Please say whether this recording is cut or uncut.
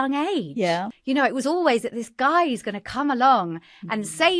cut